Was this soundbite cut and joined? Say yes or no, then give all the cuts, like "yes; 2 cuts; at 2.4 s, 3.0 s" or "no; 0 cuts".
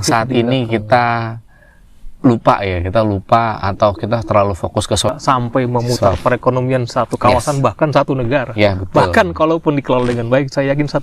yes; 1 cut; at 5.2 s